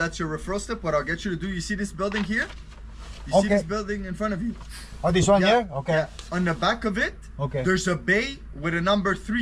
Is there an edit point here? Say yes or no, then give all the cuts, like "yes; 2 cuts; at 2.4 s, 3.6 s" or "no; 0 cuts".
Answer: no; 0 cuts